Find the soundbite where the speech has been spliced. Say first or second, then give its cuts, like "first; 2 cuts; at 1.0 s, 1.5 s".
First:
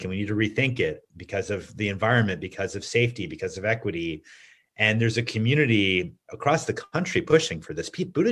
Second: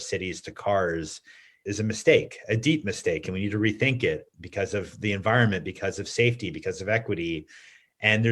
second; 1 cut; at 1.5 s